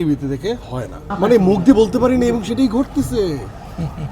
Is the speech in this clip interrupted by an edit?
yes; 1 cut; at 1.0 s

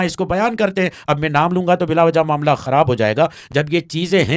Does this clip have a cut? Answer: no; 0 cuts

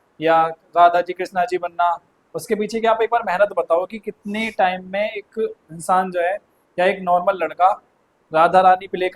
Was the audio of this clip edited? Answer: no; 0 cuts

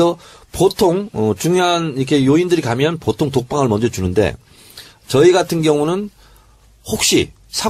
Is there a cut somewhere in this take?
yes; 1 cut; at 6.3 s

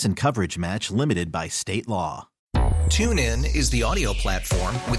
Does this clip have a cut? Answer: yes; 1 cut; at 2.3 s

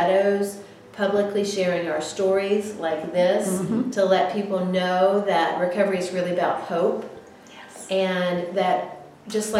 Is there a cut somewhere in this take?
no; 0 cuts

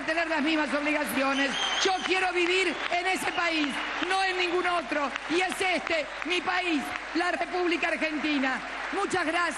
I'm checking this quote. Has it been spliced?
no; 0 cuts

